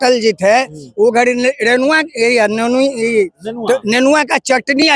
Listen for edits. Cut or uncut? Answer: uncut